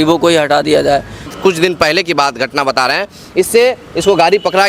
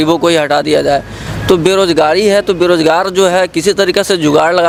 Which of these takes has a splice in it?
first; 1 cut; at 1.2 s

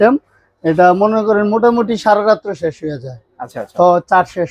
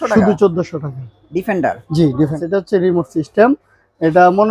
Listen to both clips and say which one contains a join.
second; 1 cut; at 2.4 s

